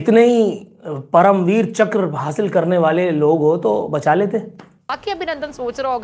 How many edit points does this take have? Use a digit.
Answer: 1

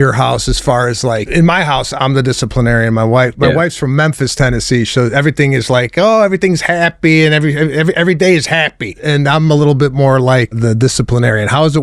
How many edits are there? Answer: 4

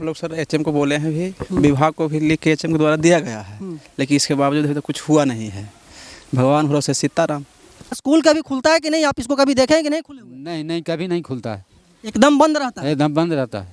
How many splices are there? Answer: 1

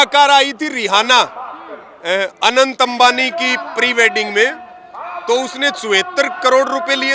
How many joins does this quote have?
0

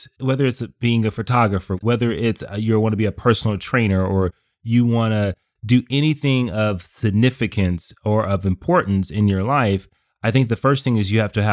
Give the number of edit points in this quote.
1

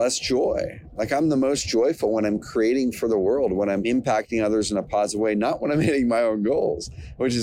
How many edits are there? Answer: 1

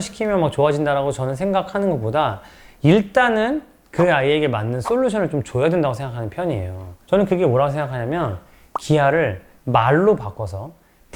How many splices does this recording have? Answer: 0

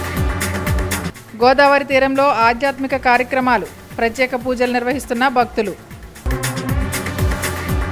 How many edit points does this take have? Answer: 0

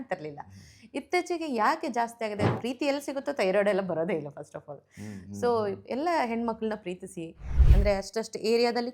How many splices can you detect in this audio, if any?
2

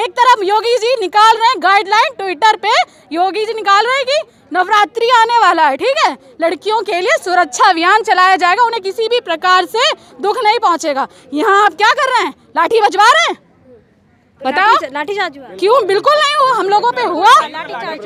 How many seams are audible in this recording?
0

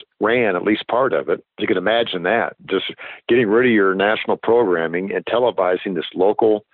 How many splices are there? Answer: 1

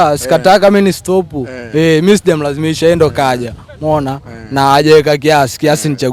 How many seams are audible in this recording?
0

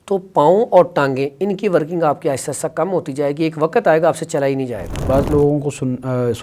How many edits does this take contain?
1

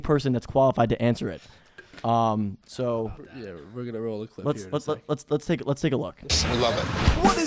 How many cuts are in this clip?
1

